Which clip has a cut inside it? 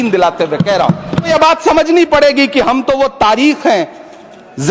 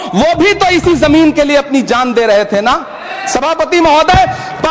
first; 1 cut; at 1.3 s

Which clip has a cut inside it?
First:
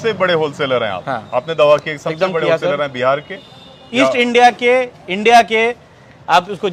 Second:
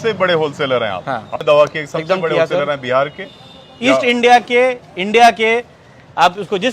second; 1 cut; at 1.4 s

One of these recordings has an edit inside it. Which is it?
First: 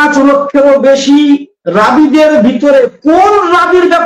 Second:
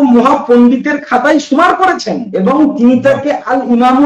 second; 1 cut; at 2.2 s

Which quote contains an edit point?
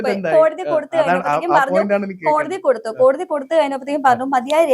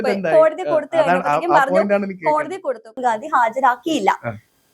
second; 1 cut; at 2.9 s

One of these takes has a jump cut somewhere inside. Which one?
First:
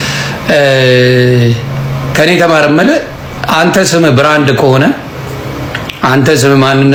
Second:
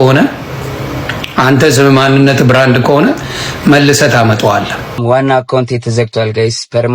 second; 1 cut; at 5.0 s

